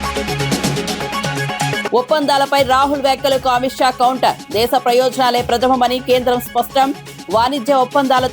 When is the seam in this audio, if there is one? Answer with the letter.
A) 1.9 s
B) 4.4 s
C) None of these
A